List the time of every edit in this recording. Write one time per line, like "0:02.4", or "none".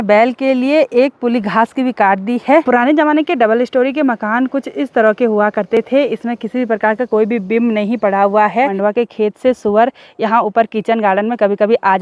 0:02.6
0:08.7